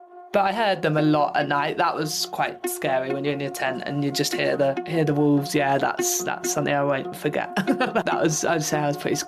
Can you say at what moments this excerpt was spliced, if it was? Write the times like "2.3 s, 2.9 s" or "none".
8.0 s